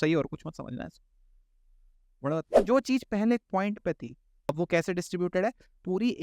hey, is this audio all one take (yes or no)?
no